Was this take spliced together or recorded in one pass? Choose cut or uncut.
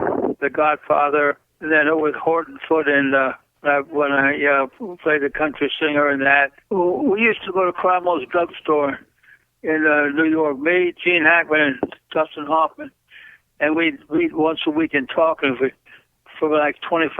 cut